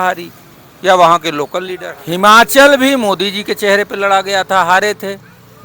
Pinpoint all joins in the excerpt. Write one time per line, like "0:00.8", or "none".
0:01.8